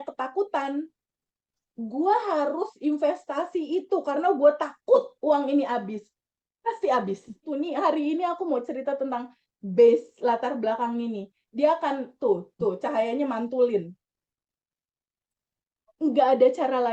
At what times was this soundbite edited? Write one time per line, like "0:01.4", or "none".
0:07.4